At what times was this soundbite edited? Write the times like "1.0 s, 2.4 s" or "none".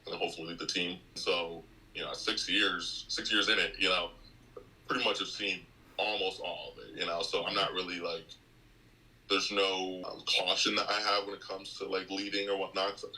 1.2 s, 10.0 s

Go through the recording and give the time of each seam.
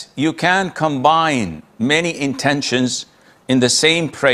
none

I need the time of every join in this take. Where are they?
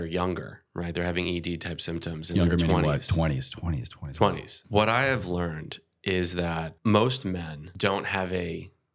4.5 s, 6.7 s, 7.6 s

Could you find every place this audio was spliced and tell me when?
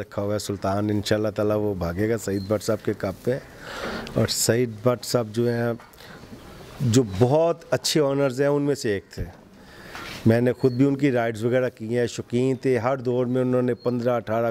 none

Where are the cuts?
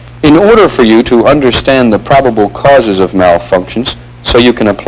3.1 s

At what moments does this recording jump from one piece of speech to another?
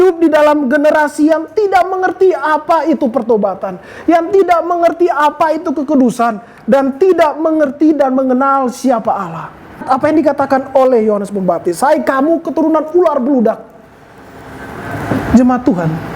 9.8 s

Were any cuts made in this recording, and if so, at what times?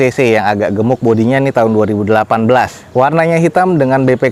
none

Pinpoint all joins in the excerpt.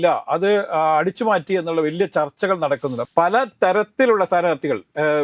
3.0 s

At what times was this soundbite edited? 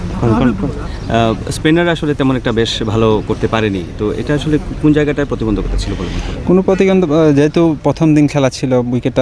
none

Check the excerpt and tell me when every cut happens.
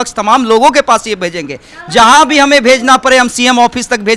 none

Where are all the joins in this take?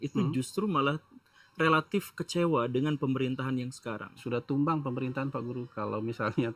none

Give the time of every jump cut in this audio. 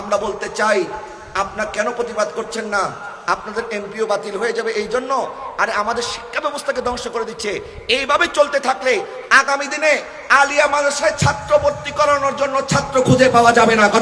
none

